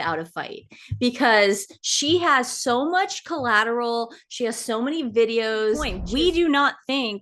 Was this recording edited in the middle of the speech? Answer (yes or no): yes